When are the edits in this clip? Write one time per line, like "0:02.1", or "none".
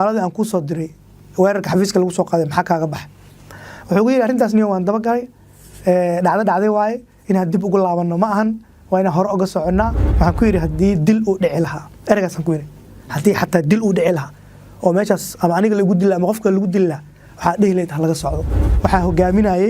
0:10.0
0:18.7